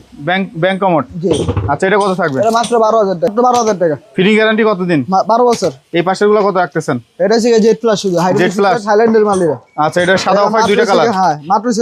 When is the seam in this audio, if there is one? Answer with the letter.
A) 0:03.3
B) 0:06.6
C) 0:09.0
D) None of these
A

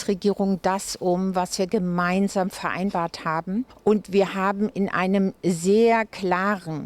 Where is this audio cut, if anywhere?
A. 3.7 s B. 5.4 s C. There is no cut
A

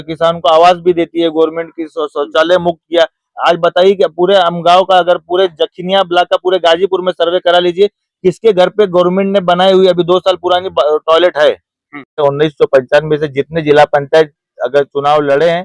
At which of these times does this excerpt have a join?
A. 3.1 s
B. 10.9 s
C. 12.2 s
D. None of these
C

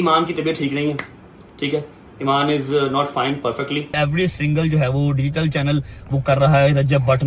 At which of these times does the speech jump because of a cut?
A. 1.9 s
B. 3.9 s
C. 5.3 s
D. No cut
B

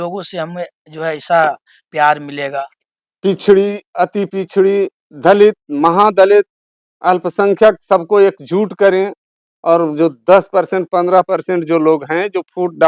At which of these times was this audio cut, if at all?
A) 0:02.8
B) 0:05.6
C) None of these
A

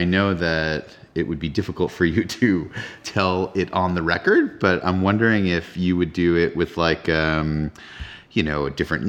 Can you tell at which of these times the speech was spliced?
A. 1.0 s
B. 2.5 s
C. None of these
A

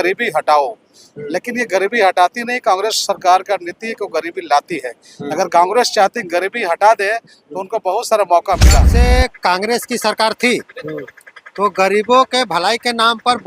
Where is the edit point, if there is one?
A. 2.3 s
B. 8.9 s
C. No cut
B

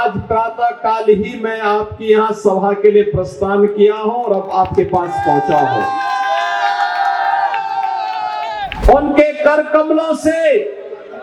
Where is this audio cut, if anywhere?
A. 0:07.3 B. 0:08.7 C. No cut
B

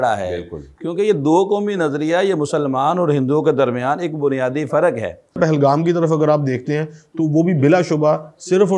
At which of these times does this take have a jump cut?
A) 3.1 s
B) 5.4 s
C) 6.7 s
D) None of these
B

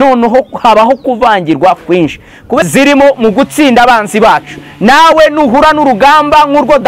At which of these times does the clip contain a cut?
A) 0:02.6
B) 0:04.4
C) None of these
A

